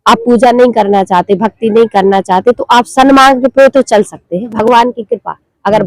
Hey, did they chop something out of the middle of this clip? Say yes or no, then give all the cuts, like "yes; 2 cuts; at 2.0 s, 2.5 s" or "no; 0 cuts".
yes; 1 cut; at 4.5 s